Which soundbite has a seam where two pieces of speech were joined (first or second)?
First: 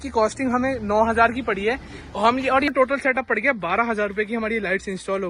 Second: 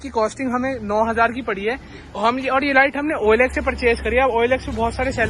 first